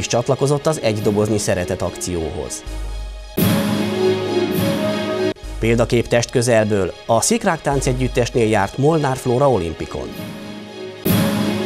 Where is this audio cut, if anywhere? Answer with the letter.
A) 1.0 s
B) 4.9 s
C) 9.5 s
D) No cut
D